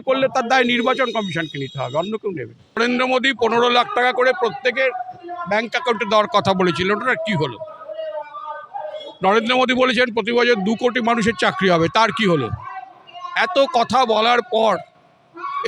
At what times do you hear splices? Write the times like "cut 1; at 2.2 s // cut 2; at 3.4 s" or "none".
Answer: cut 1; at 2.8 s